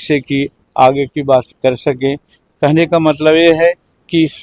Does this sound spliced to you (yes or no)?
no